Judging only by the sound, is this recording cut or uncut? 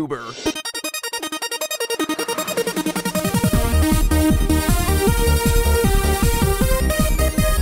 uncut